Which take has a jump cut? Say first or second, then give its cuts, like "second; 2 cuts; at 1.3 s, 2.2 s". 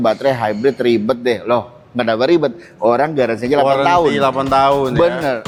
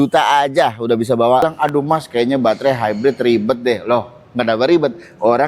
second; 1 cut; at 1.4 s